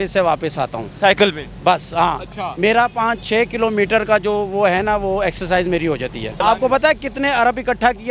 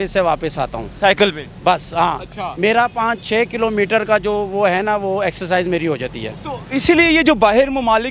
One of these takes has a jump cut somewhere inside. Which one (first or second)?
first